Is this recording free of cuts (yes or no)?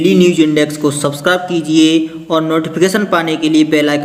yes